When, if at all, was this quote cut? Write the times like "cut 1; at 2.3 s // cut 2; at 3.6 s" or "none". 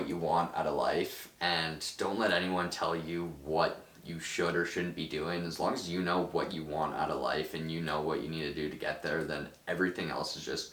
none